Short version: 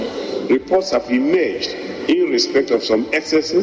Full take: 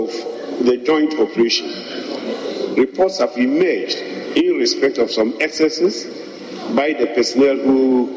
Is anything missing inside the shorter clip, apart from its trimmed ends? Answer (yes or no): no